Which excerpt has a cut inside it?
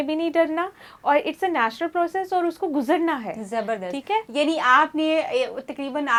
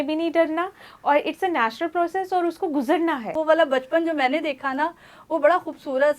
second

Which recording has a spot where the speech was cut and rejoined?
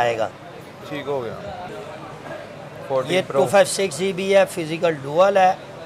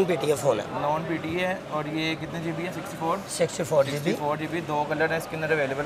first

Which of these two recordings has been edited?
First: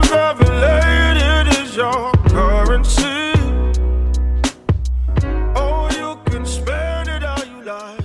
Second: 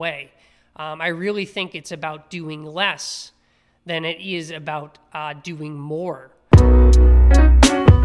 second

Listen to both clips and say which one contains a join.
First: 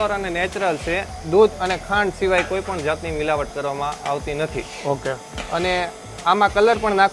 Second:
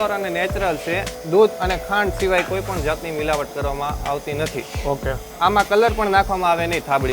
second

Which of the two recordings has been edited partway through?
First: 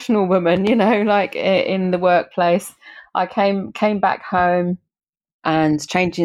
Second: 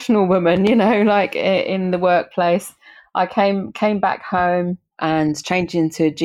second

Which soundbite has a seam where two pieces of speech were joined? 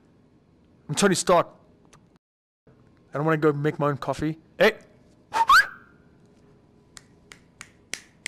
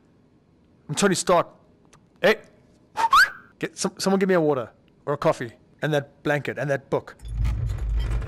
second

